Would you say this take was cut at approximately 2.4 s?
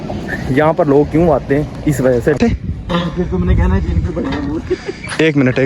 yes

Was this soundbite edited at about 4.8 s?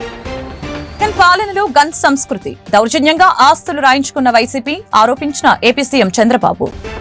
no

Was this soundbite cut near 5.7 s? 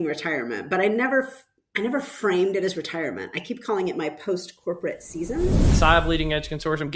yes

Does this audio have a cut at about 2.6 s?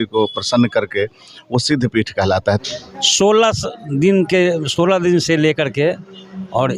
yes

